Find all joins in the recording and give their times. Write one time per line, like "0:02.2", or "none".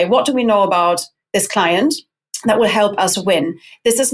none